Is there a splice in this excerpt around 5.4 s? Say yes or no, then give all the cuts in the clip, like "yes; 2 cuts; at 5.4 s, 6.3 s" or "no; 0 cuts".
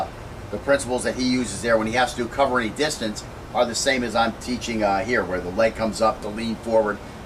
no; 1 cut; at 3.2 s